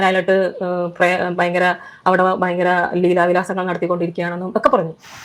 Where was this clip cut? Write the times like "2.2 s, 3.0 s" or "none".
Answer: none